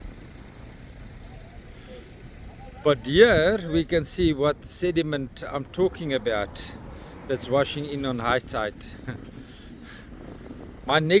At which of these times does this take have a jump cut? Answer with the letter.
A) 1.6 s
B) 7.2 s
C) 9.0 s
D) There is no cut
D